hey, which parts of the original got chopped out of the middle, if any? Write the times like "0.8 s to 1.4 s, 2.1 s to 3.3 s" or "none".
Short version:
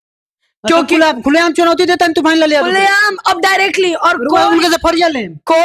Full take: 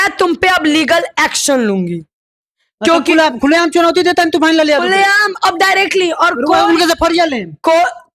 none

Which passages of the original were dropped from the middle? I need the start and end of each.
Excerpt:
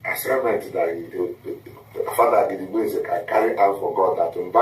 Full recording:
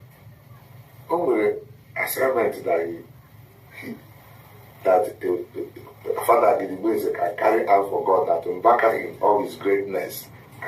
3.0 s to 5.2 s

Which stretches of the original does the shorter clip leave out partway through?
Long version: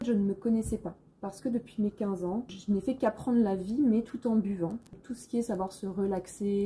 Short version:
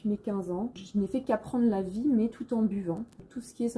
none

